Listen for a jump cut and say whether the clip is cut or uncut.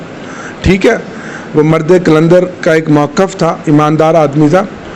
uncut